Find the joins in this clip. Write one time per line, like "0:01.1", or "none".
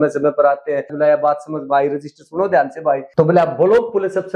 0:00.9
0:03.1